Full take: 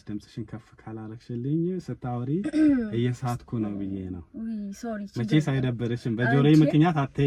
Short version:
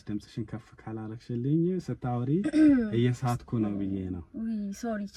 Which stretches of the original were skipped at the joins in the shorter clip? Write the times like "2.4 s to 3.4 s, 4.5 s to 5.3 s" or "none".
none

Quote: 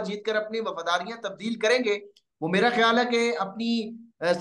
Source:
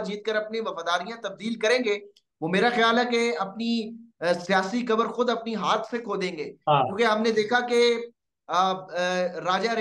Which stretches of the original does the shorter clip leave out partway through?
none

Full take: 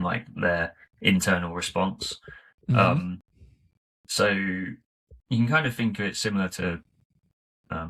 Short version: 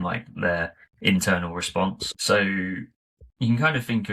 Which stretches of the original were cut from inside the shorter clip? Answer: 2.1 s to 4.0 s

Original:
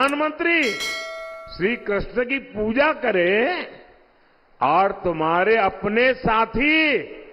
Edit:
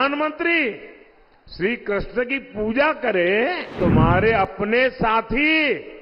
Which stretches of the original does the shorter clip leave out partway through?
3.7 s to 5.0 s

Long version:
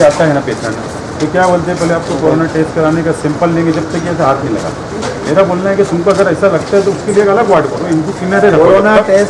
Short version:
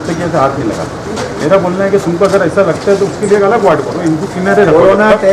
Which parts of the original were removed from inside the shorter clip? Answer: none

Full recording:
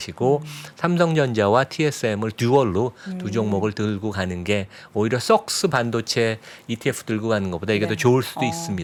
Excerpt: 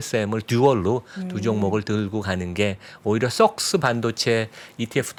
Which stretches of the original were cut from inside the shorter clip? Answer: none

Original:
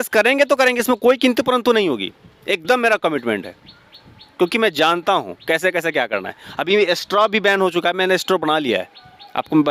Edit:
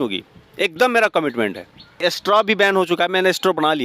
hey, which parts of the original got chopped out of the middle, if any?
3.9 s to 6.9 s

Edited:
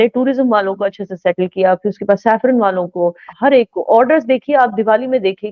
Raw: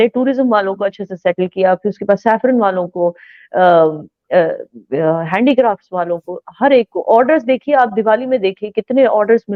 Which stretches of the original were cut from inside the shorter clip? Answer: 3.3 s to 6.4 s

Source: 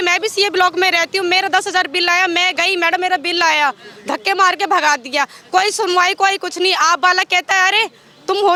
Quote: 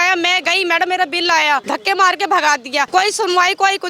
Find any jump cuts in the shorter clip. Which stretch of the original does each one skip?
3.8 s to 4.0 s, 5.3 s to 5.5 s

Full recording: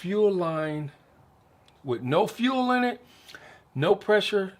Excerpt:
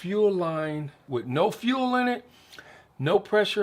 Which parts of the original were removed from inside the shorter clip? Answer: 0.9 s to 1.7 s

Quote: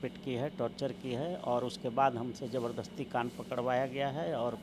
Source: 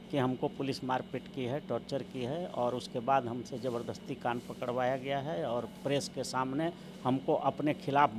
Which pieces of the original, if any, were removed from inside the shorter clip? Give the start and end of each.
none

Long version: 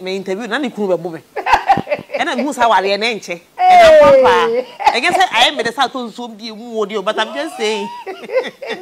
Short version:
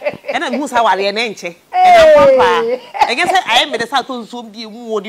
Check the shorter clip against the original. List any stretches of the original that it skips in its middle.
none

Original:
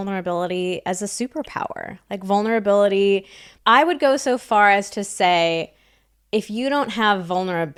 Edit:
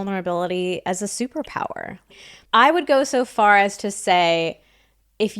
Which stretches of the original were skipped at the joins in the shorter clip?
2.2 s to 3.3 s

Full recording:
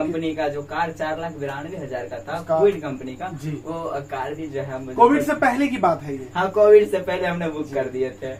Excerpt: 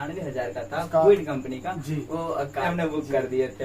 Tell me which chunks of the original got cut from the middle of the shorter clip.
4.3 s to 7.3 s

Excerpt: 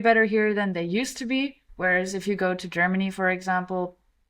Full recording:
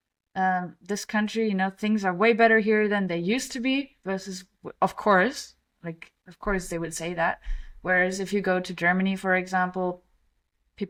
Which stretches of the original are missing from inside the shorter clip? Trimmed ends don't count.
4.0 s to 7.7 s

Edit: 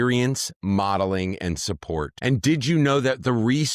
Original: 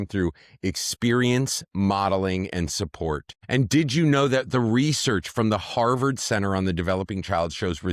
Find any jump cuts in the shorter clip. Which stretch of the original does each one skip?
3.2 s to 3.4 s

